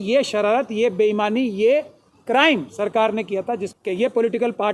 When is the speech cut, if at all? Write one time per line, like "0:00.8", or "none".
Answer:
0:03.7